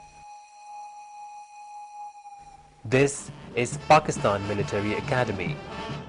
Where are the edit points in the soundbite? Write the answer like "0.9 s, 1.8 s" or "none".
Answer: none

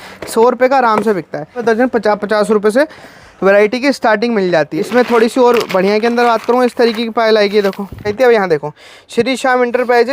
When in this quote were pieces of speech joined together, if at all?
1.6 s, 4.8 s, 8.1 s

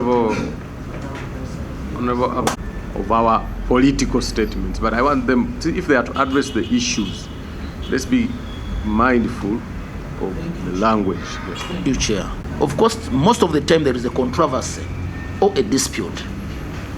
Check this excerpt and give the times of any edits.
12.3 s

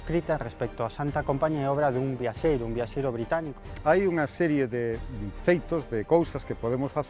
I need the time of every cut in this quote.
3.7 s

